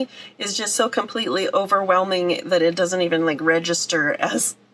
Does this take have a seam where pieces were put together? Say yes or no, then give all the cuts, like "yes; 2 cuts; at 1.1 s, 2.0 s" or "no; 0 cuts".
no; 0 cuts